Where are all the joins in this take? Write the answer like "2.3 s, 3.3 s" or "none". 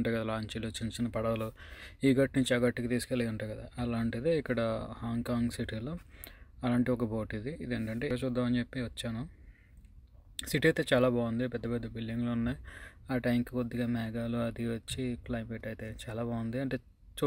8.1 s